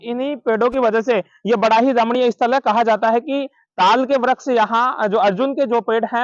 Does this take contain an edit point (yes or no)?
no